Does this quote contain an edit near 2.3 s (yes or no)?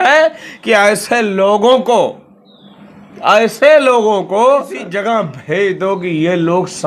no